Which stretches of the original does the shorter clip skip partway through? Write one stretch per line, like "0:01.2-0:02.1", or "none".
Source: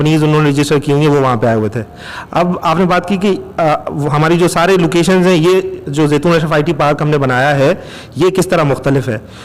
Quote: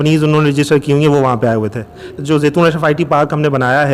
0:02.1-0:05.8

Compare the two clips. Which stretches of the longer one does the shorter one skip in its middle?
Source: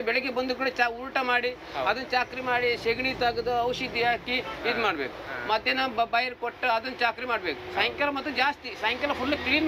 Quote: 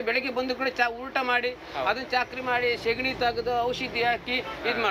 none

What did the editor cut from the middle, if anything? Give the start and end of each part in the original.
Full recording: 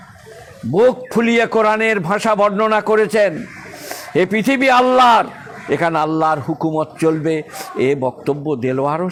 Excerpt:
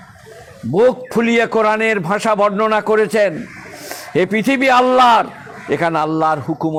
none

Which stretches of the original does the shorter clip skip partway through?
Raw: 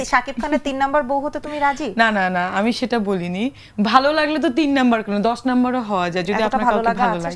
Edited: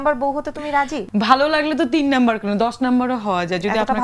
0:01.9-0:03.6

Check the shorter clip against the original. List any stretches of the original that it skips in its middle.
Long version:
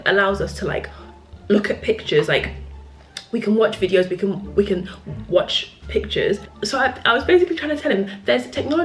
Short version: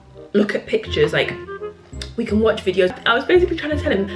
0:04.1-0:07.0

